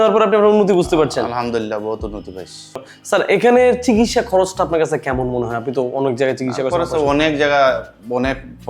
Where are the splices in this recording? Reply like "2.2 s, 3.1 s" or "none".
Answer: 2.8 s

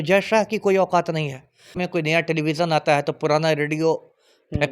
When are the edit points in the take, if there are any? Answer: 1.8 s

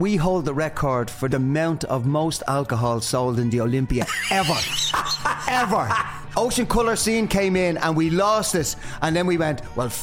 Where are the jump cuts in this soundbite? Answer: 1.3 s, 6.2 s

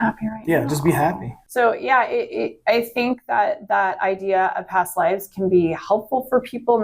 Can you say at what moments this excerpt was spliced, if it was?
1.3 s

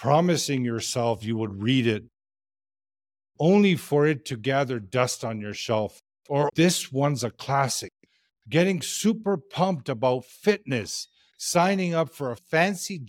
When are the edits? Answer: 6.4 s

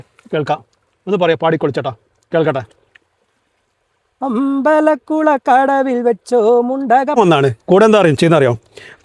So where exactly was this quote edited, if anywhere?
7.2 s

